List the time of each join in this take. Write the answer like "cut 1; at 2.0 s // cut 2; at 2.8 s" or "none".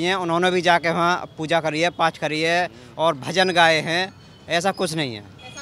none